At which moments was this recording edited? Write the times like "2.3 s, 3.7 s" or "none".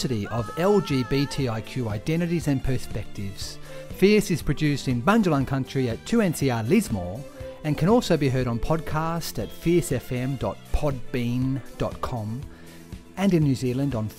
none